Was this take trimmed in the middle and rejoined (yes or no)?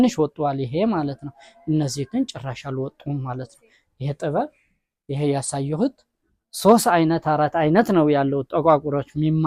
no